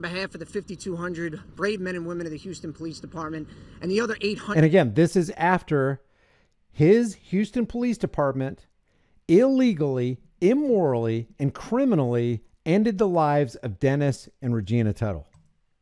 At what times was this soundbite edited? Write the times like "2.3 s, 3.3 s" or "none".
none